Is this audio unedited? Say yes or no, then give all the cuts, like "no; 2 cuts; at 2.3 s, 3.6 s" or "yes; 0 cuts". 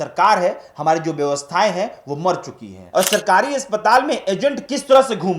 no; 1 cut; at 2.7 s